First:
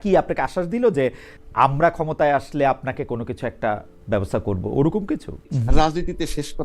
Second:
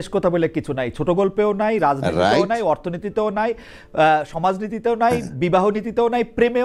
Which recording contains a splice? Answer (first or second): first